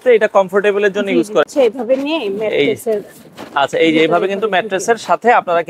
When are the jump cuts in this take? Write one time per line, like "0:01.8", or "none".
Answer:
0:01.5